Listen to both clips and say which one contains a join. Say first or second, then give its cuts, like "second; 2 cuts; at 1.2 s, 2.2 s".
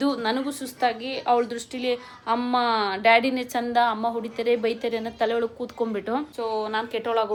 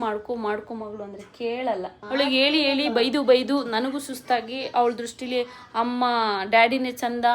second; 1 cut; at 2.0 s